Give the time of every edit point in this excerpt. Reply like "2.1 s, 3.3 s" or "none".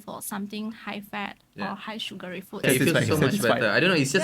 2.6 s